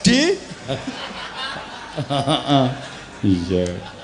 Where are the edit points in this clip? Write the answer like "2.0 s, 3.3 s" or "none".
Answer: none